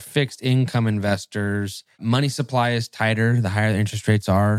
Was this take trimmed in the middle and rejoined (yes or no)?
yes